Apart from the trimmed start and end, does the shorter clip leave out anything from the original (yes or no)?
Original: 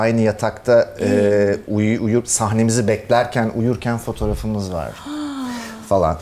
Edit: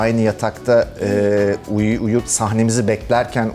no